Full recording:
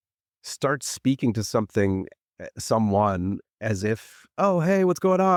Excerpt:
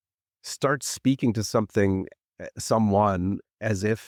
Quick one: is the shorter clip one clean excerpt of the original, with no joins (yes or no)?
yes